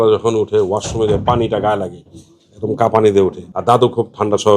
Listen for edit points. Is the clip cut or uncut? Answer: cut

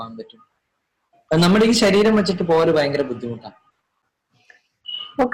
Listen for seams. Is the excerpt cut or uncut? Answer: uncut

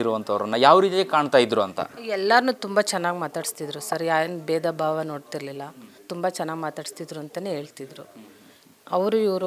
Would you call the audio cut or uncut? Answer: uncut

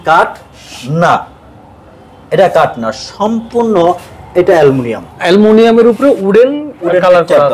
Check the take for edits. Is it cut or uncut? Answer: uncut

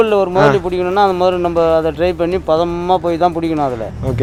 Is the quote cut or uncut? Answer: uncut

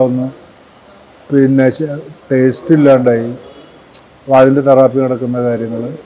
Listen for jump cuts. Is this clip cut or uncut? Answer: uncut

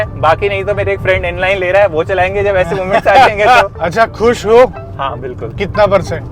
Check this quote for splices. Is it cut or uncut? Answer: cut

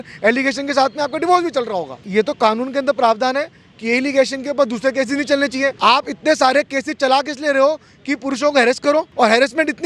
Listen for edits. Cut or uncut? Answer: cut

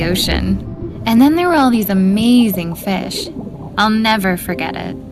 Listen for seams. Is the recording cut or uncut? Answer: uncut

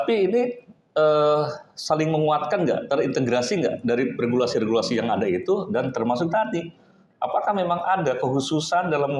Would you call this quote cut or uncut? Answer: uncut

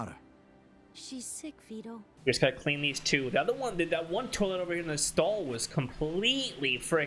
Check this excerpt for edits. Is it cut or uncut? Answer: cut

